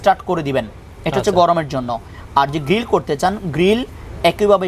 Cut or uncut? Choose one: uncut